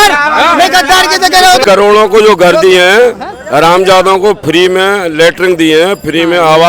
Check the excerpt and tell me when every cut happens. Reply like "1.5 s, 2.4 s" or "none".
1.6 s